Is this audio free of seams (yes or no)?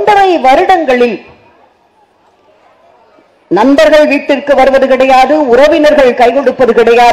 yes